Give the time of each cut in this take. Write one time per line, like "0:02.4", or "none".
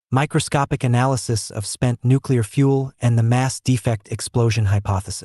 0:02.5